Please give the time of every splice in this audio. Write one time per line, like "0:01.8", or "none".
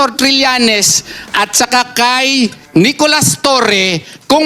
0:02.6